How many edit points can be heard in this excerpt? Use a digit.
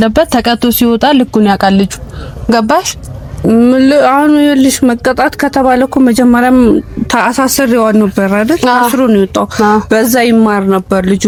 0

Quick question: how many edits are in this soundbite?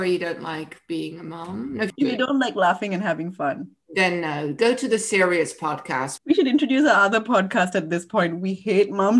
1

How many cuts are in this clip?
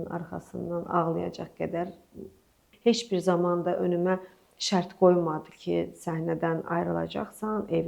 1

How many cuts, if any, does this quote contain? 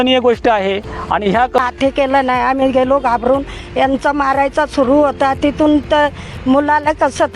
1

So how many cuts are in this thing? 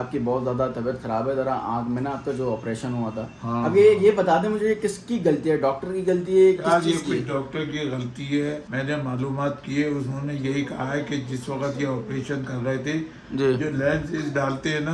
0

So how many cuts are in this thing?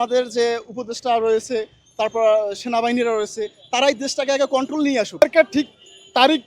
1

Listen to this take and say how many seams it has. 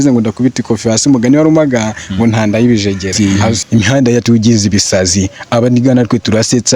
1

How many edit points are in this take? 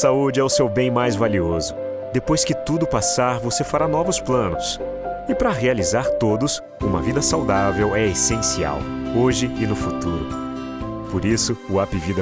0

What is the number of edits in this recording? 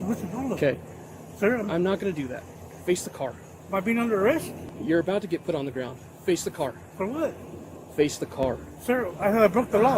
2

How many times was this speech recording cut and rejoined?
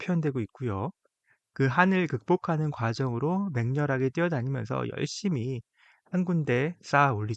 0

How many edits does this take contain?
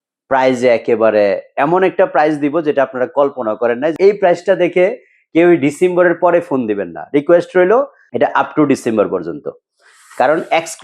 2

